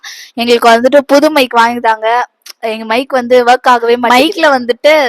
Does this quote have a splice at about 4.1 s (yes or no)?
yes